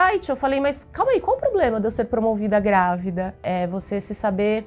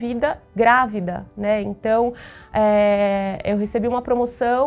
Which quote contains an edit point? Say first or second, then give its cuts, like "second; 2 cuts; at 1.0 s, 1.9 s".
first; 1 cut; at 3.4 s